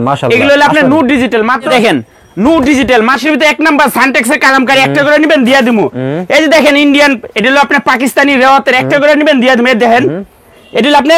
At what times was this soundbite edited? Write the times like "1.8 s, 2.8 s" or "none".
1.7 s, 3.2 s